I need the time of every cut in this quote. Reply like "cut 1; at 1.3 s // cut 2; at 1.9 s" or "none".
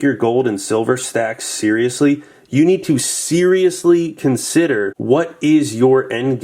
cut 1; at 4.9 s